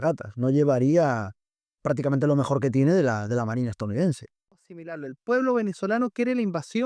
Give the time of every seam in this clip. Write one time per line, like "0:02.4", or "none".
0:04.6